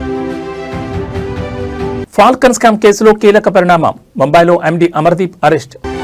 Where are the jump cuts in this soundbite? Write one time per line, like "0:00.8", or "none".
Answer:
0:01.7

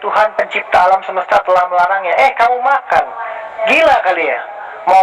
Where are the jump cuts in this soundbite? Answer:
none

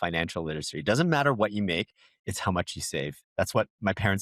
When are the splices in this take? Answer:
none

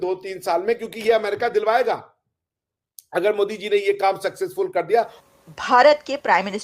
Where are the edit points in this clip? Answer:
0:05.2

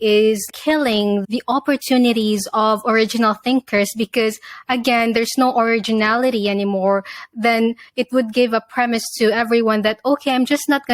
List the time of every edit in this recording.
none

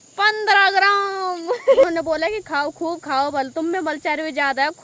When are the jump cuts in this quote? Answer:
0:01.8

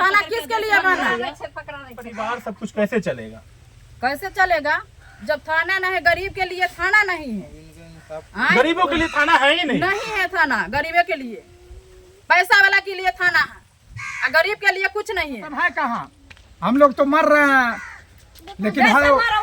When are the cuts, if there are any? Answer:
0:02.2
0:15.5

